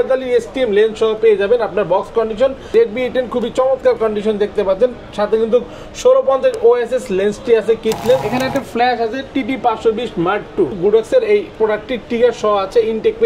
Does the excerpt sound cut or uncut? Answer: cut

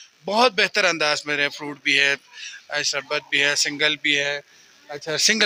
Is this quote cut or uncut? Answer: uncut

